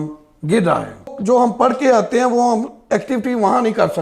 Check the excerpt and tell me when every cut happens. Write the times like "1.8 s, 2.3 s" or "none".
1.1 s